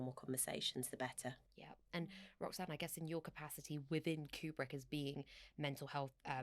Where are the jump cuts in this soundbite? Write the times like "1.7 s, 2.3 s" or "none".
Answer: none